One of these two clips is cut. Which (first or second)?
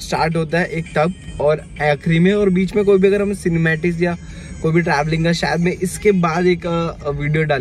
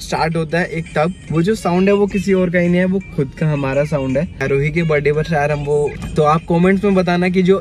second